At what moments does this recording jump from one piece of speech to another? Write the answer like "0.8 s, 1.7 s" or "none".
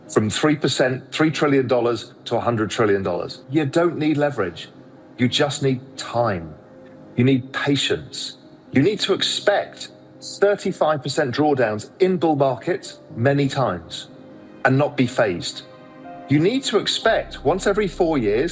3.4 s